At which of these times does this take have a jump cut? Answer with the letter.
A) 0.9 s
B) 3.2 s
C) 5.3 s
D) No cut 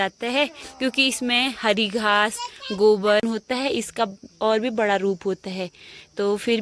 B